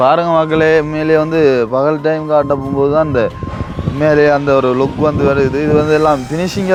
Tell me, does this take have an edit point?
no; 0 cuts

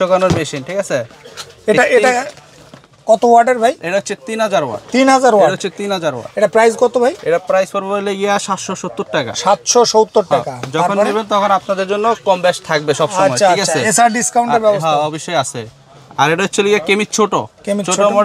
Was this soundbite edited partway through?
no; 0 cuts

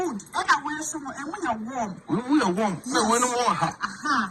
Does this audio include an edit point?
no; 0 cuts

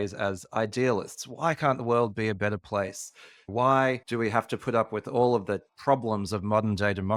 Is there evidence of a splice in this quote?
no; 0 cuts

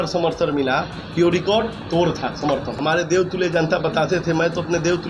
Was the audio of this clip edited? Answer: yes; 1 cut; at 2.7 s

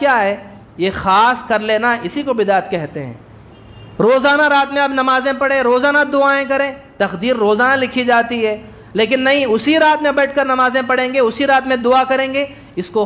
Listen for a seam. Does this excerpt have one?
no; 0 cuts

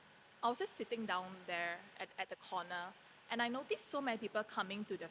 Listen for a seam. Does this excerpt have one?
no; 0 cuts

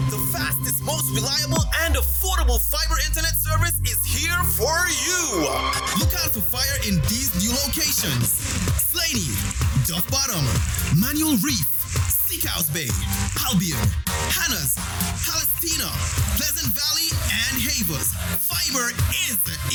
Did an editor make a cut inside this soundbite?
no; 0 cuts

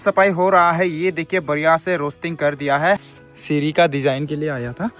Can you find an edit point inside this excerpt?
yes; 1 cut; at 3.1 s

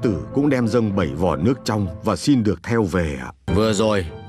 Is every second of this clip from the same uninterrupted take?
no; 1 cut; at 3.4 s

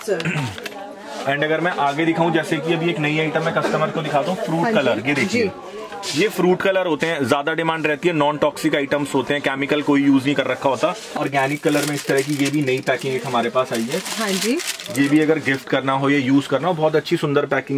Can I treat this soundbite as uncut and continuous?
no; 1 cut; at 11.2 s

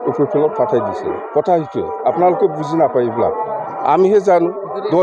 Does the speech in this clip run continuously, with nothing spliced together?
yes; 0 cuts

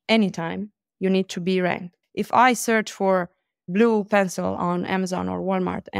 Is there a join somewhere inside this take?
yes; 1 cut; at 2.0 s

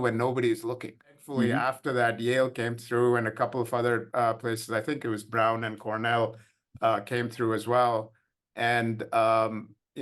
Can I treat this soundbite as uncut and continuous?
no; 1 cut; at 1.6 s

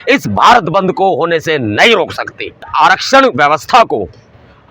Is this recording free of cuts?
no; 1 cut; at 2.6 s

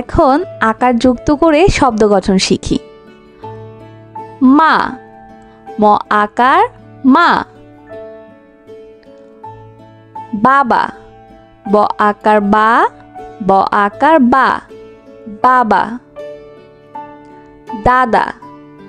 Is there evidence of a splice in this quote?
no; 0 cuts

